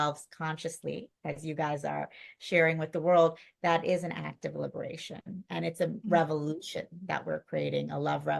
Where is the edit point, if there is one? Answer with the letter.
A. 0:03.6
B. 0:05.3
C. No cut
C